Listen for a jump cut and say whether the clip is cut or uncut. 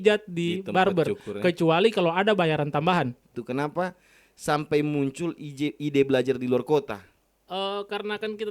cut